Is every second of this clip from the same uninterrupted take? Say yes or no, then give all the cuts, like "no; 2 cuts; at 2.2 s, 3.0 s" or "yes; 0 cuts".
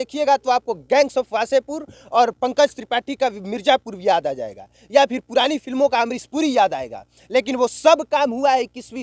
yes; 0 cuts